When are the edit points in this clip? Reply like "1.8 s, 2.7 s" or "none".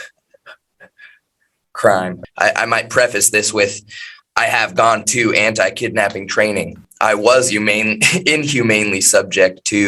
2.2 s, 6.8 s